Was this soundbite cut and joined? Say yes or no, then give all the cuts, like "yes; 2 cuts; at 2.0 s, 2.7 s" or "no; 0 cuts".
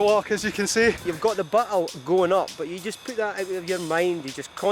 yes; 1 cut; at 1.1 s